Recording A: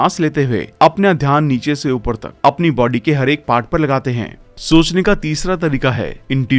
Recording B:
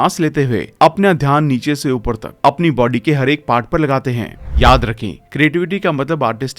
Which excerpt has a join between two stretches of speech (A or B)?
B